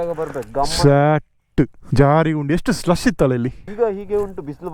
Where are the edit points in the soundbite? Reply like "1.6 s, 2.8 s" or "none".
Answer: 1.8 s, 3.6 s